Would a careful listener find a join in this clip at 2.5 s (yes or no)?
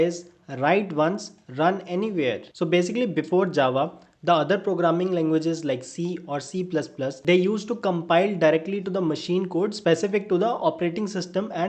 no